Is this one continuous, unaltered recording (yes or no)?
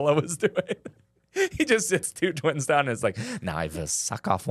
yes